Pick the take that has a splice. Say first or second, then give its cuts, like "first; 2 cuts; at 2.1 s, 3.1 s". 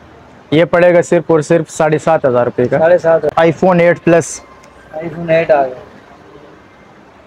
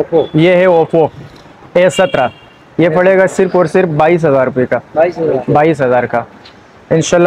first; 1 cut; at 3.3 s